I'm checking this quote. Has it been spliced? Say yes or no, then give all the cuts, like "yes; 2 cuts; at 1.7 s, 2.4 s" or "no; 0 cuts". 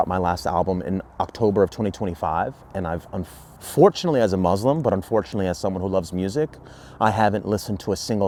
no; 0 cuts